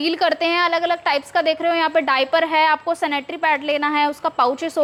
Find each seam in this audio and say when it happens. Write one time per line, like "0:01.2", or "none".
none